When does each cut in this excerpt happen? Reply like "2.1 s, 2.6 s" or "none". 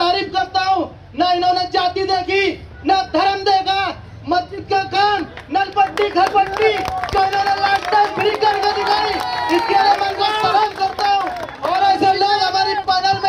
none

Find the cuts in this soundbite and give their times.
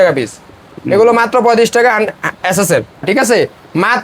3.0 s

